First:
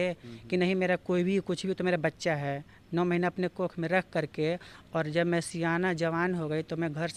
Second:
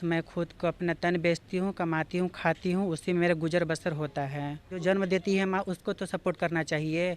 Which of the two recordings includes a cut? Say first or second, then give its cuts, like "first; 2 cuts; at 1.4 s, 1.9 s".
second; 1 cut; at 4.7 s